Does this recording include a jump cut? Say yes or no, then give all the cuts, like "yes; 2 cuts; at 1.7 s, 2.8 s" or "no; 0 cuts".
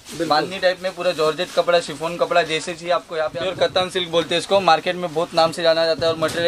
yes; 1 cut; at 3.2 s